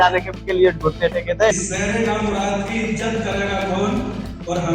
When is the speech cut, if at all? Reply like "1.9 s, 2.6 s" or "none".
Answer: 1.5 s

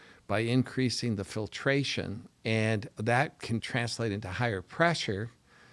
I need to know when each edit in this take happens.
2.2 s, 3.7 s

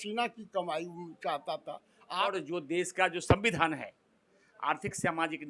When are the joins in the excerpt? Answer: 2.3 s

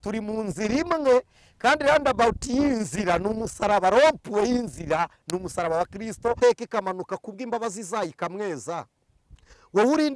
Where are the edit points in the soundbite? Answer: 6.4 s

